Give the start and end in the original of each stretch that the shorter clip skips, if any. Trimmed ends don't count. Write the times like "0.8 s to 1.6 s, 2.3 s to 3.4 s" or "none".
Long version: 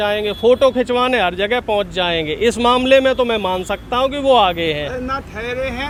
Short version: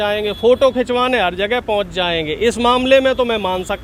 none